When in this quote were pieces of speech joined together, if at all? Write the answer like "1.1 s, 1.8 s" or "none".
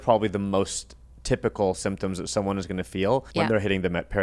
3.3 s